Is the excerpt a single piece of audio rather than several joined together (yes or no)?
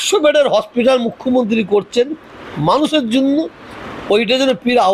yes